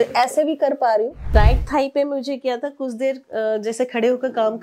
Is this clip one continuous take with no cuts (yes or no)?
no